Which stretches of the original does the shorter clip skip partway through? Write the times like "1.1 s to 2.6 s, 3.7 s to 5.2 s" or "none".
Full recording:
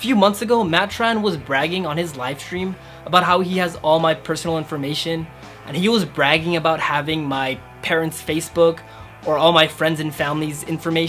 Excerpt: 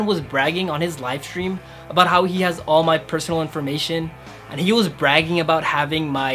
none